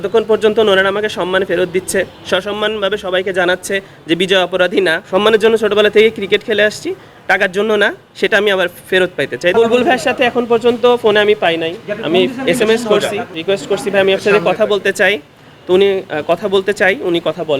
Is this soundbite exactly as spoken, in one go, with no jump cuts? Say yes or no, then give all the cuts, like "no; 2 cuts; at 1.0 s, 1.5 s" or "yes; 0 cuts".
no; 3 cuts; at 5.0 s, 9.5 s, 13.3 s